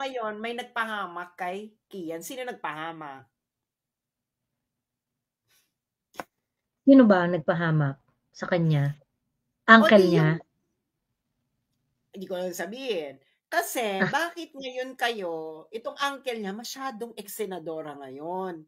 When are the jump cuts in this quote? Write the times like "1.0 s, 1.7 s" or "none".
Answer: none

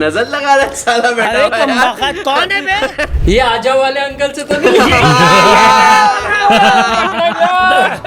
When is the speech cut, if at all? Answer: 3.1 s

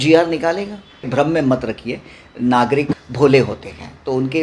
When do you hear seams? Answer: 1.0 s, 3.0 s

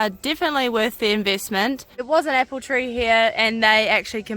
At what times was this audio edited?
2.0 s

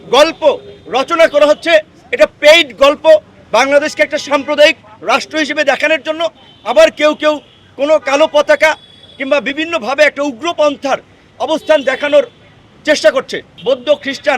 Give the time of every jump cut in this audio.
13.4 s

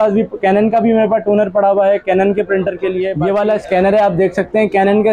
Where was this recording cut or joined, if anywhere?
3.1 s

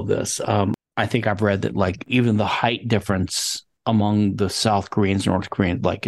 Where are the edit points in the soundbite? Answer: 0.8 s, 2.0 s

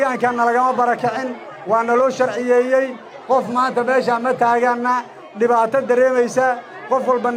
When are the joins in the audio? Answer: none

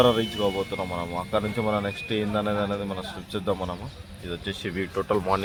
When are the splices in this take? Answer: none

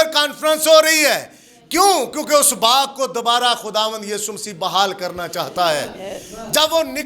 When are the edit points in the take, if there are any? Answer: none

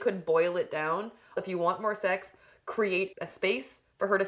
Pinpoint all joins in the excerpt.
1.4 s, 3.1 s

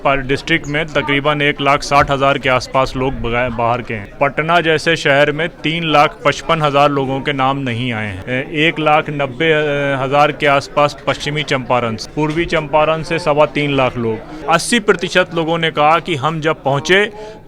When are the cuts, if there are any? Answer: 4.0 s, 8.2 s, 12.0 s, 14.3 s

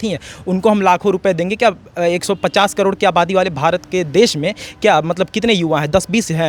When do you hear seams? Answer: none

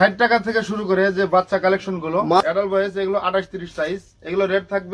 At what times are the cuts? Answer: 2.4 s

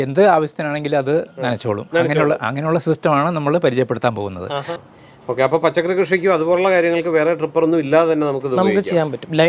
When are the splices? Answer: 4.8 s

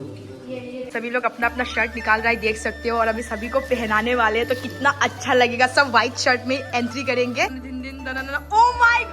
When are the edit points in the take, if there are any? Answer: 0.9 s, 7.6 s

